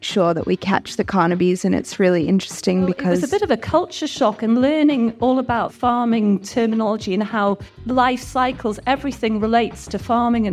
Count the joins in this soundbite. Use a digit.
3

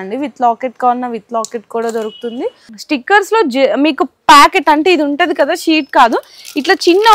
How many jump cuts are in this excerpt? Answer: 1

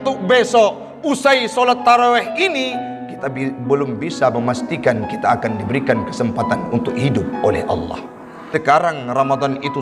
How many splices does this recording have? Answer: 1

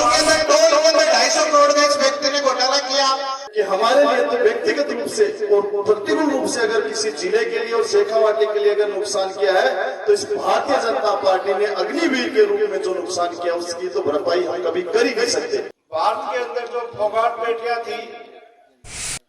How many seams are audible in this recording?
2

